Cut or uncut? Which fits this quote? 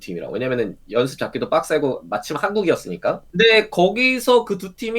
cut